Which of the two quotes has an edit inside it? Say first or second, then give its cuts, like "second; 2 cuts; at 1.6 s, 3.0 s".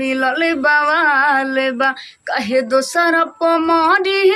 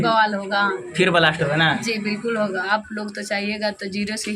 second; 1 cut; at 2.7 s